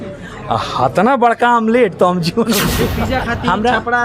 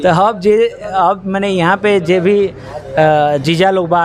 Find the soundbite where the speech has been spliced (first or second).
first